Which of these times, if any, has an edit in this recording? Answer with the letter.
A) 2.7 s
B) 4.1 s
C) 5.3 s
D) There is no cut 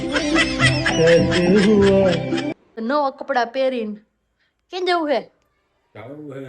A